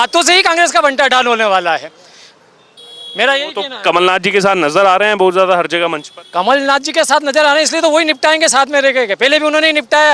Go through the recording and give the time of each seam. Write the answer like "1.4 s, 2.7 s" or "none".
none